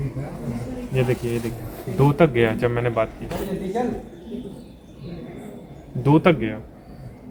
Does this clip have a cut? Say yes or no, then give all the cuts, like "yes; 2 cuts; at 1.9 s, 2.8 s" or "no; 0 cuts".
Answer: no; 0 cuts